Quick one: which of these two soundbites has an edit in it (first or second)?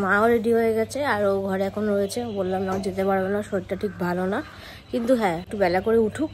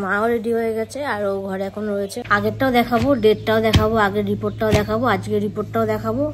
second